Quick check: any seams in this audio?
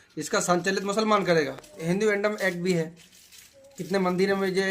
yes; 1 cut; at 1.8 s

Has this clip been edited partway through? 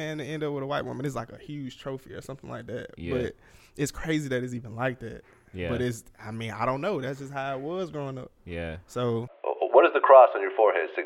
yes; 1 cut; at 9.3 s

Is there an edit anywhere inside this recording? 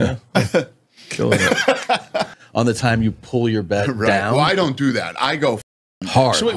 yes; 1 cut; at 2.4 s

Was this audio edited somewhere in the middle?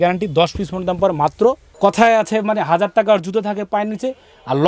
yes; 1 cut; at 1.8 s

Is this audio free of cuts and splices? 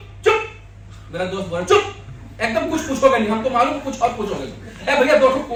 yes; 0 cuts

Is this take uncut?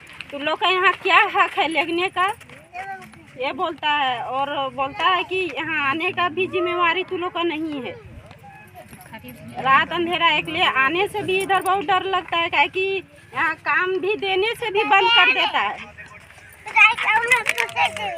yes; 0 cuts

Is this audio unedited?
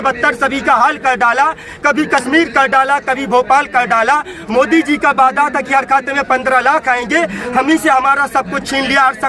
yes; 0 cuts

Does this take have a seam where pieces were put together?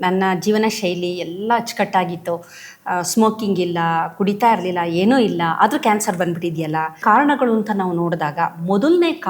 yes; 1 cut; at 7.0 s

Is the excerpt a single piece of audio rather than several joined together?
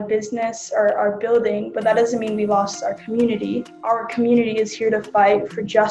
yes; 0 cuts

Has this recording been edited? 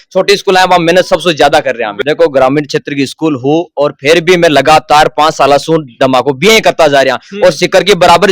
yes; 1 cut; at 1.9 s

